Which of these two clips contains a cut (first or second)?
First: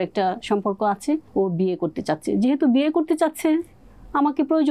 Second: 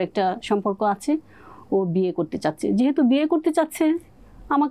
first